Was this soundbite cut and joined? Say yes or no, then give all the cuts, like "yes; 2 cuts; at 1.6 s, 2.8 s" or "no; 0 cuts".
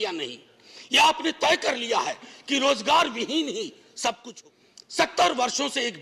yes; 1 cut; at 4.3 s